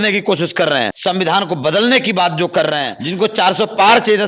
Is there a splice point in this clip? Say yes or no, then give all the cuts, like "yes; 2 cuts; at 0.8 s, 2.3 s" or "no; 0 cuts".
yes; 2 cuts; at 0.9 s, 3.0 s